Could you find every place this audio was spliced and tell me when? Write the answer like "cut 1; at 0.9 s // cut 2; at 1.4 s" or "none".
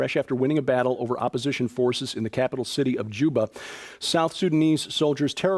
cut 1; at 2.7 s